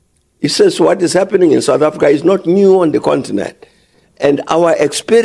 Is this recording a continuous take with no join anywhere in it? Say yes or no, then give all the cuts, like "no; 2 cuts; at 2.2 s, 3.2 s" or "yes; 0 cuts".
yes; 0 cuts